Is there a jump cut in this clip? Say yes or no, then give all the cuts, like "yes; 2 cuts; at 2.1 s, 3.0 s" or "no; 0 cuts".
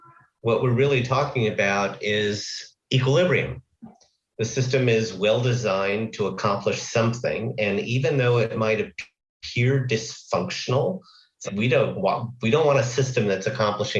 no; 0 cuts